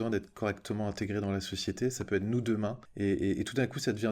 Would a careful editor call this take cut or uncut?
cut